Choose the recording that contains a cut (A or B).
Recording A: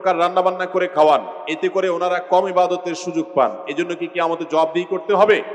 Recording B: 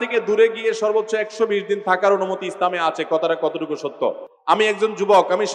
B